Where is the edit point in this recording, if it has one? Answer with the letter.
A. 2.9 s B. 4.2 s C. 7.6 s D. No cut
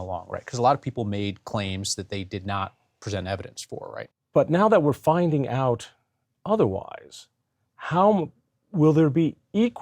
B